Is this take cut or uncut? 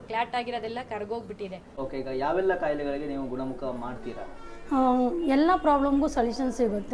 cut